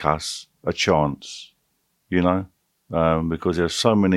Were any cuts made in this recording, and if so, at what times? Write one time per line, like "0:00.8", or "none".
none